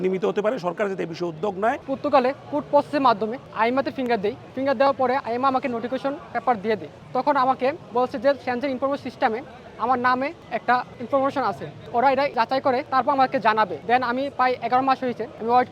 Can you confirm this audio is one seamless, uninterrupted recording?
no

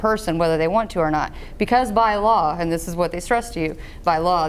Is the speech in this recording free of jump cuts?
yes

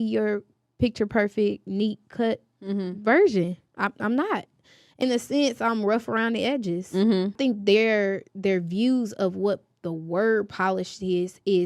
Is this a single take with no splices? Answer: no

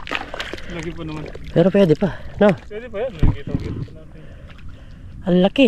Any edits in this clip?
no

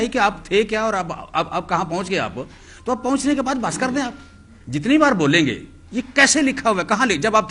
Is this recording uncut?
yes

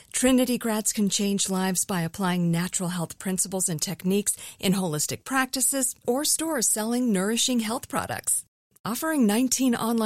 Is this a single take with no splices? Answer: yes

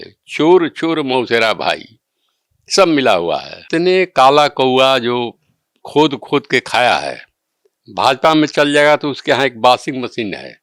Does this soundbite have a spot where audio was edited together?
yes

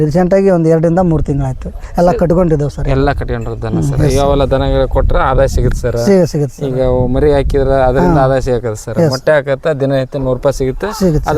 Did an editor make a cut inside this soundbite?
no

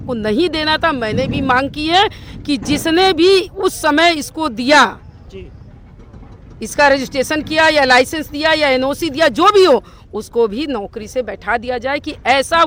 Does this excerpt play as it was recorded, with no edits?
yes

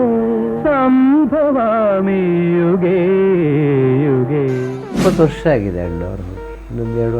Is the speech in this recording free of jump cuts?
no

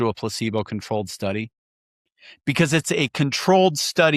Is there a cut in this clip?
no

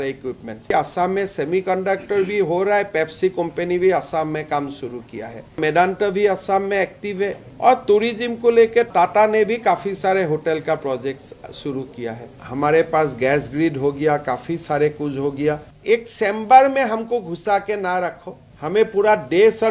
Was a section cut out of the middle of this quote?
yes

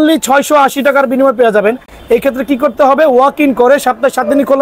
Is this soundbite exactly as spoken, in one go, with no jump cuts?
yes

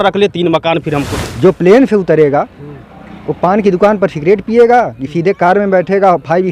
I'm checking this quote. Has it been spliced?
yes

